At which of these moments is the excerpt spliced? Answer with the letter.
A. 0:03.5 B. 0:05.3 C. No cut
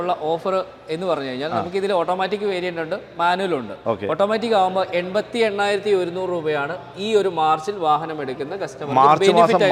C